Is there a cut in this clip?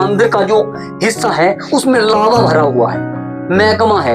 no; 0 cuts

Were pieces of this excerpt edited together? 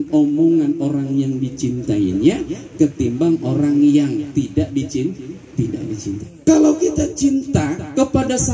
yes; 1 cut; at 6.3 s

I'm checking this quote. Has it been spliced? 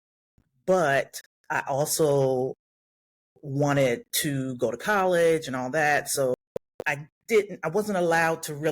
yes; 1 cut; at 6.3 s

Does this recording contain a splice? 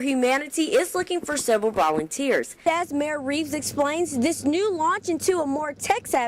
yes; 1 cut; at 2.6 s

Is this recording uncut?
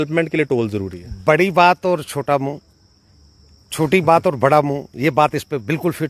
yes; 0 cuts

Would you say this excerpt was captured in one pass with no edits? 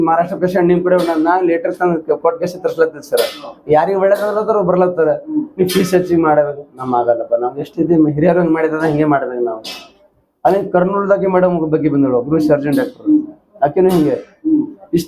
yes; 0 cuts

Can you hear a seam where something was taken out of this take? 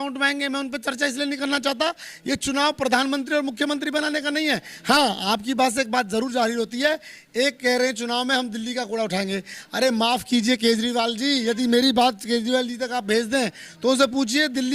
no; 0 cuts

